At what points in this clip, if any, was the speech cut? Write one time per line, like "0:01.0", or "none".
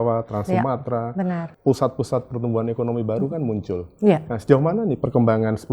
0:01.5